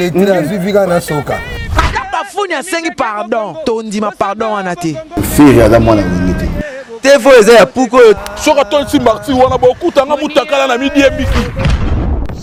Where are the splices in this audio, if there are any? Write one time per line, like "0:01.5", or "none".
none